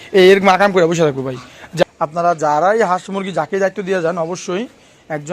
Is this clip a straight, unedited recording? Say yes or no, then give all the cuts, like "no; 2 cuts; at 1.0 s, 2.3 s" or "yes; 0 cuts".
no; 1 cut; at 1.8 s